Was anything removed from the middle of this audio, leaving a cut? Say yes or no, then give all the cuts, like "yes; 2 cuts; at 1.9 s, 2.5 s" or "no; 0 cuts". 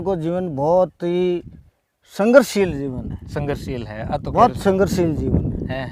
no; 0 cuts